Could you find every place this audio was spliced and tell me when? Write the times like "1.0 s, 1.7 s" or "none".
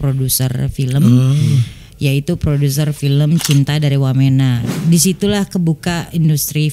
4.6 s